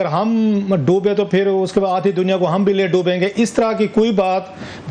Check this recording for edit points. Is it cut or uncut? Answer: uncut